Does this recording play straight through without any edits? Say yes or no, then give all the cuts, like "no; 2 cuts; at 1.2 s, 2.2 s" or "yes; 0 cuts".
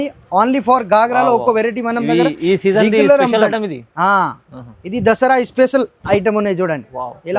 yes; 0 cuts